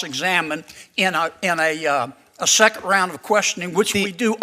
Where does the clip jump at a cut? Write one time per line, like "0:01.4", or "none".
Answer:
none